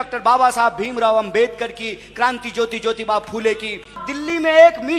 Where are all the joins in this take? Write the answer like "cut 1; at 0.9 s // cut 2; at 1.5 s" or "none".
cut 1; at 4.0 s